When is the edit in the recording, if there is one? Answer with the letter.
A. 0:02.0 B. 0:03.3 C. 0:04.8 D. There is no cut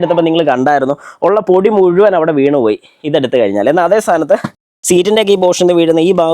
C